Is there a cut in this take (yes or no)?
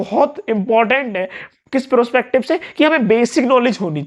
no